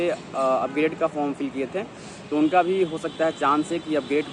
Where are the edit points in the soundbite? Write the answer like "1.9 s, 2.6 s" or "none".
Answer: none